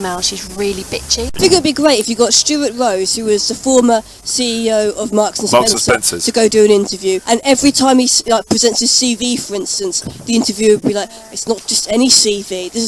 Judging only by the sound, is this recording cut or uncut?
cut